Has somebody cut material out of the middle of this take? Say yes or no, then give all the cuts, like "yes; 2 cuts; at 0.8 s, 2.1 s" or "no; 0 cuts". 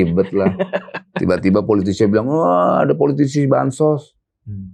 no; 0 cuts